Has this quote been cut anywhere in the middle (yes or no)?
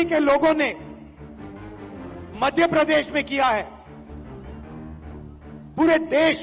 no